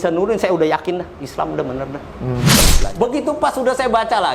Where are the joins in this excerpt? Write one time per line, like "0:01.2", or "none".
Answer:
0:02.6